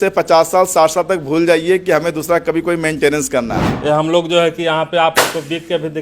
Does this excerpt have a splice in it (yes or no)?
yes